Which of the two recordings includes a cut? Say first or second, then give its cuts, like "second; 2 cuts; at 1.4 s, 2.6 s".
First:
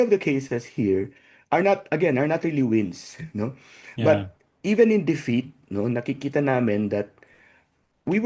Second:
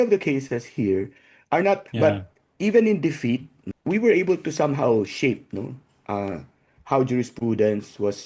second; 2 cuts; at 1.8 s, 3.6 s